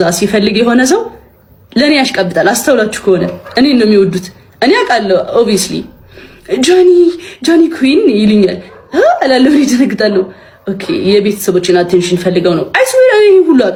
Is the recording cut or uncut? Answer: uncut